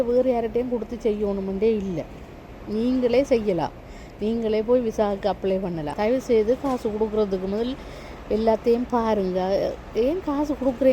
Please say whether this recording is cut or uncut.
cut